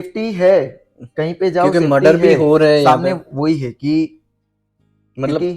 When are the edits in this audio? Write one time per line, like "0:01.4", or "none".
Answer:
none